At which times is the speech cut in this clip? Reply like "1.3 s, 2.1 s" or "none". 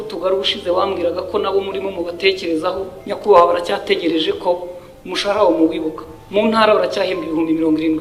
none